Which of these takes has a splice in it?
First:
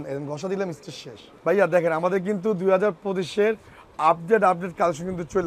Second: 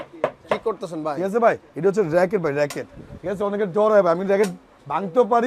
first; 1 cut; at 1.2 s

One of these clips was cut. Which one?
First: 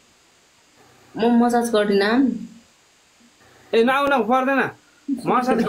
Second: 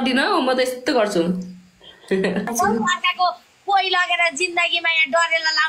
second; 1 cut; at 2.5 s

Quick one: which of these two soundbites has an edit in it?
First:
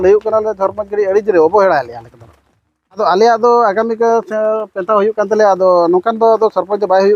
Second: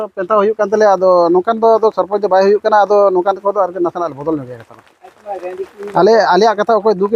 first; 1 cut; at 3.0 s

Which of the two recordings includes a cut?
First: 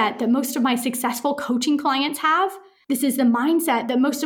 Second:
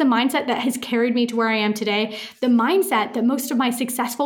first; 1 cut; at 2.7 s

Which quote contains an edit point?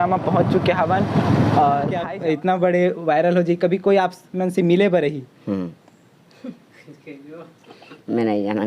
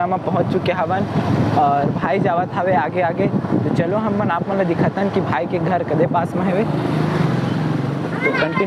first; 1 cut; at 2.0 s

